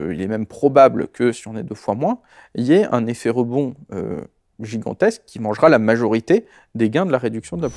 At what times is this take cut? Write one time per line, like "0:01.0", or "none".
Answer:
none